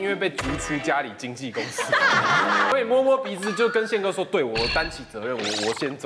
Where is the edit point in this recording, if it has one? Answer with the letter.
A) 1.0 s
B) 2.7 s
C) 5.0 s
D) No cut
B